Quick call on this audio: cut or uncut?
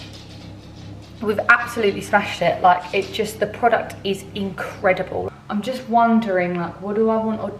cut